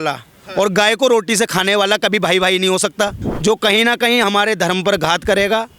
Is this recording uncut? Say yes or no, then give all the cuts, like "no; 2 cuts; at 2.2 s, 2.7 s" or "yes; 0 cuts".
no; 1 cut; at 3.2 s